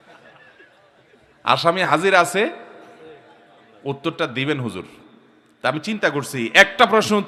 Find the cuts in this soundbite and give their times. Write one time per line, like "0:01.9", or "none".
none

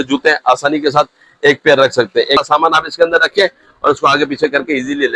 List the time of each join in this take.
0:02.4

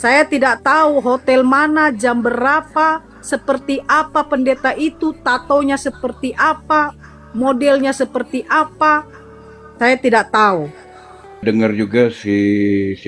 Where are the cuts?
0:11.4

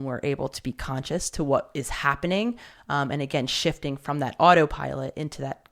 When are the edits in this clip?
none

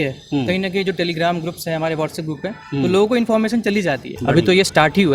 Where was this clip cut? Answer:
0:04.1

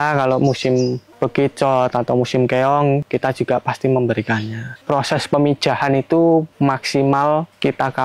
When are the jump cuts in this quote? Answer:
0:04.8

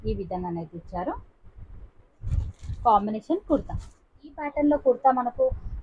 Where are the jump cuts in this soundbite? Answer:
0:04.4

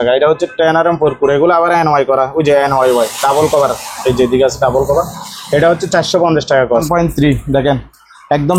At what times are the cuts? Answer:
0:06.9

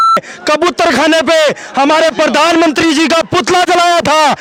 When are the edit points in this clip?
none

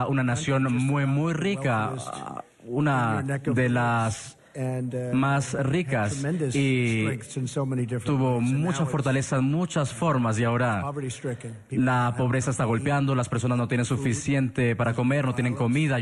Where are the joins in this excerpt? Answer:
0:06.2

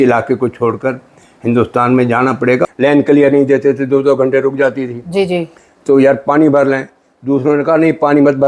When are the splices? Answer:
0:02.6

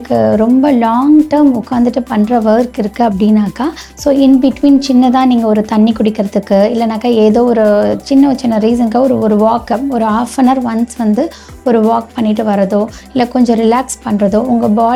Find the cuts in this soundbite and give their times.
none

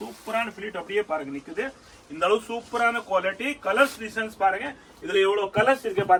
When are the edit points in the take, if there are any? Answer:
none

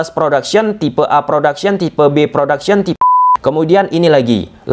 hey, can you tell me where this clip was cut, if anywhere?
0:03.0

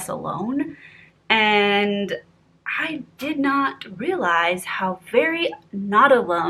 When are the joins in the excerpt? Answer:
none

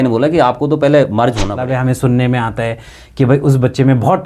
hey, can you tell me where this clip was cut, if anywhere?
0:01.6

